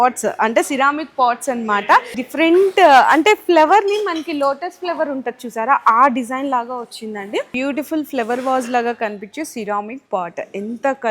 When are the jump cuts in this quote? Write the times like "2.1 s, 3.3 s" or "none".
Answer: 2.2 s, 7.5 s